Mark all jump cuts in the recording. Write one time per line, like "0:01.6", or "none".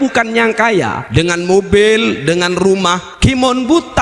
0:01.0
0:03.1